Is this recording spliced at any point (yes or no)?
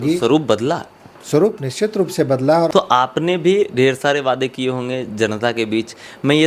yes